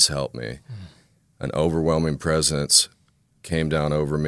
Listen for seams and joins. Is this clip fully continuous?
yes; 0 cuts

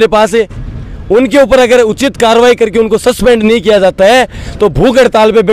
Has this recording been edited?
no; 0 cuts

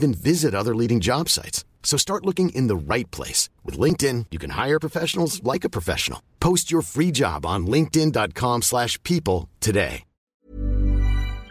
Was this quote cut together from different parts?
yes; 1 cut; at 10.3 s

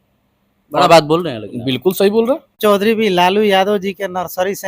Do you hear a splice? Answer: yes; 1 cut; at 2.6 s

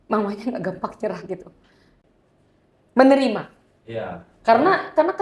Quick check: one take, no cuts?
no; 1 cut; at 1.8 s

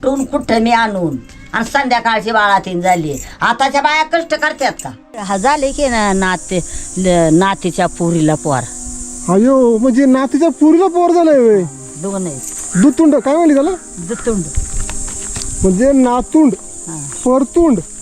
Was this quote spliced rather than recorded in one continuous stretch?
yes; 1 cut; at 5.3 s

